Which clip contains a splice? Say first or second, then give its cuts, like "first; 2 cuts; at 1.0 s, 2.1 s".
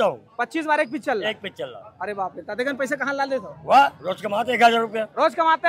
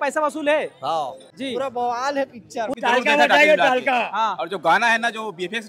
second; 2 cuts; at 1.2 s, 2.7 s